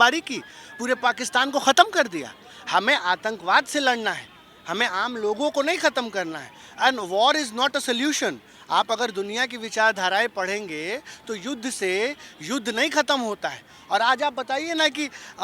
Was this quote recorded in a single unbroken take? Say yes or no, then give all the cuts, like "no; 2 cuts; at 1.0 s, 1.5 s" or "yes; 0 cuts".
yes; 0 cuts